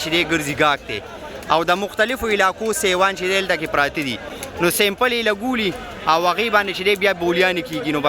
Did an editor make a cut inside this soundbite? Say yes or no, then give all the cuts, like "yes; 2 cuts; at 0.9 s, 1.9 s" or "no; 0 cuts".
no; 0 cuts